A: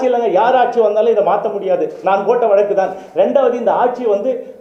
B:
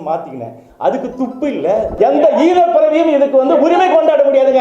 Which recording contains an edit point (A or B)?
B